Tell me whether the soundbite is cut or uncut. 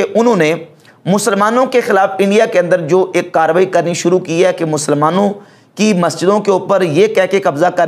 uncut